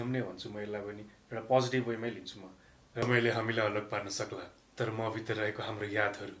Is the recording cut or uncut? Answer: cut